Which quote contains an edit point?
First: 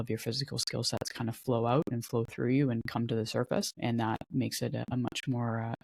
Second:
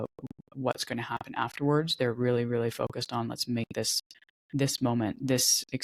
first; 2 cuts; at 3.8 s, 4.8 s

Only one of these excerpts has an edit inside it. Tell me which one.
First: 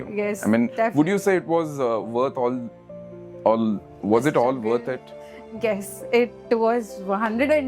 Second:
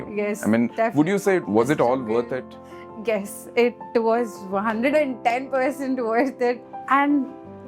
second; 2 cuts; at 1.4 s, 6.7 s

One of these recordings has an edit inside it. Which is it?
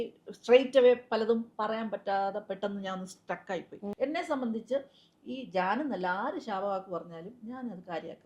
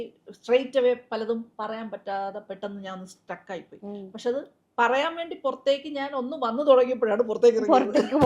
first; 1 cut; at 3.9 s

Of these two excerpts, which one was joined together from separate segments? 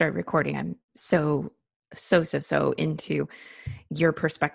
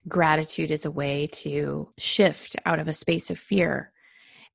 second; 1 cut; at 2.0 s

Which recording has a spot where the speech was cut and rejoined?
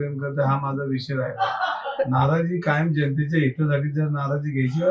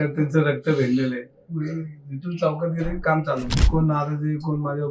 second; 1 cut; at 3.7 s

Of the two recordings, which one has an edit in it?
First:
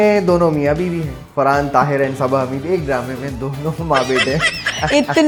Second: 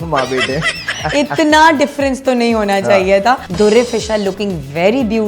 second; 1 cut; at 3.5 s

